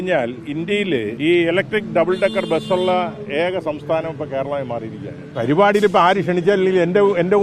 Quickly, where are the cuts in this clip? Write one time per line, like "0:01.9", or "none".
0:01.1
0:05.3